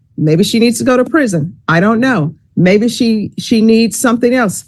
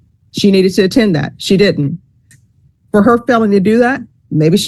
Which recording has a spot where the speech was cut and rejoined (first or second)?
second